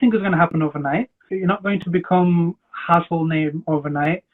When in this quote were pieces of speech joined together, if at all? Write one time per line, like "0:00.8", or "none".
0:01.3